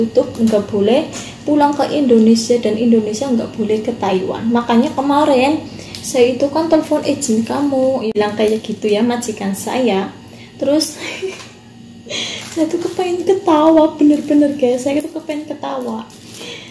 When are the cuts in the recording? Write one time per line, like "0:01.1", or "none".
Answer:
0:08.2